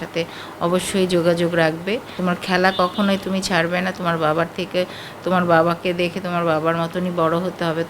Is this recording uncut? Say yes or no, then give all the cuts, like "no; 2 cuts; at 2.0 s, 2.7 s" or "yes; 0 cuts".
no; 1 cut; at 2.2 s